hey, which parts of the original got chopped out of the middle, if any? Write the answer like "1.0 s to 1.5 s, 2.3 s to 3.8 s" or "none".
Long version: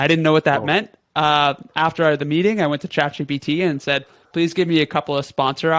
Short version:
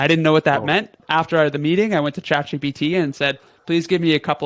1.0 s to 1.7 s